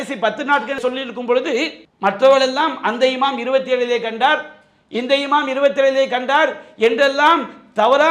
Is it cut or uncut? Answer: uncut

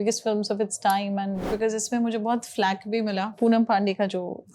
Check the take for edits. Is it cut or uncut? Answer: cut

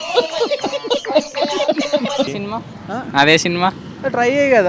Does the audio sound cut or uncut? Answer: cut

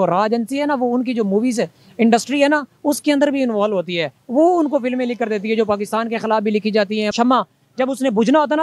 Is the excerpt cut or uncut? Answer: cut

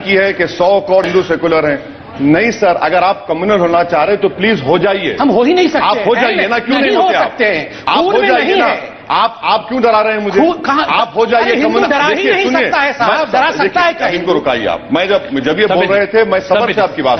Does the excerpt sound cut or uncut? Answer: cut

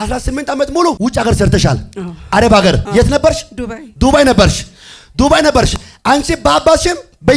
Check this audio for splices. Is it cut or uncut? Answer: cut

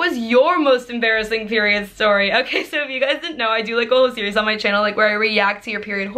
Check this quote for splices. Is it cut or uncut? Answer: uncut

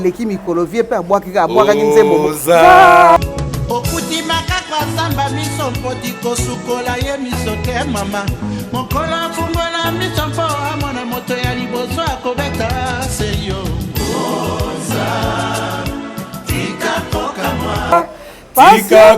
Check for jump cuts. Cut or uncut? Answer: cut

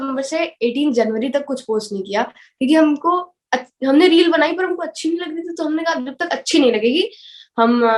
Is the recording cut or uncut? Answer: uncut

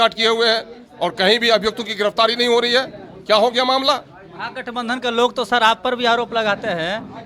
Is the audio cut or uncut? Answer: uncut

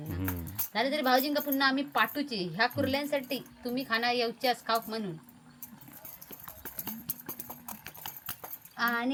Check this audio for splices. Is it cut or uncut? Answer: uncut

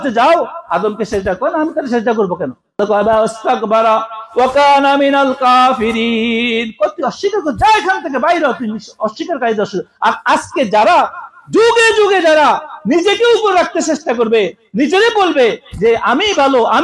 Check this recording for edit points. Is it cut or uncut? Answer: cut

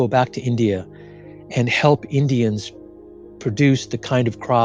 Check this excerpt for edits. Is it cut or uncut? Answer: uncut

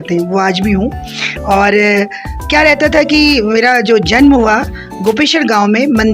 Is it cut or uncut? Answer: uncut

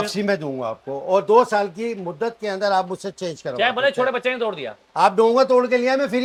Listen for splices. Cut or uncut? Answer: uncut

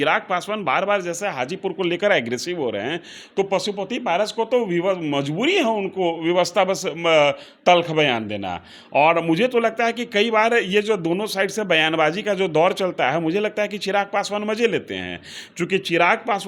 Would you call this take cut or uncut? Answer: uncut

